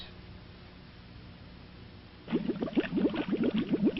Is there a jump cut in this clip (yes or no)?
no